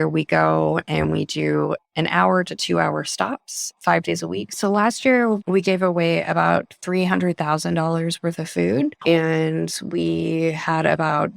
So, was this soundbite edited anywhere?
yes; 2 cuts; at 4.6 s, 9.0 s

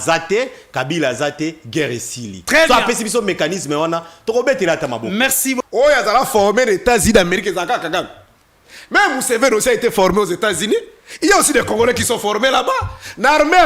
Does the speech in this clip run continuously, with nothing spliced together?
no; 1 cut; at 5.6 s

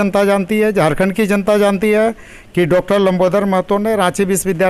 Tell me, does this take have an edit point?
no; 0 cuts

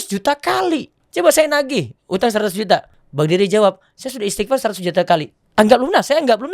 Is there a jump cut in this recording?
yes; 3 cuts; at 1.0 s, 3.0 s, 5.4 s

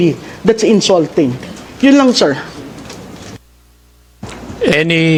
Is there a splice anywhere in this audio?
no; 0 cuts

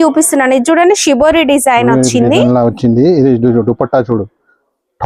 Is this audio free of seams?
yes; 0 cuts

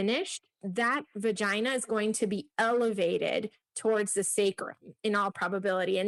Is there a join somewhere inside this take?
no; 0 cuts

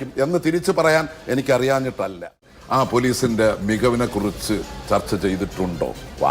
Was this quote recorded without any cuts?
no; 1 cut; at 2.5 s

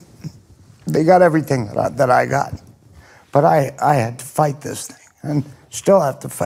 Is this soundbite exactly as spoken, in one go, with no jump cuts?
yes; 0 cuts

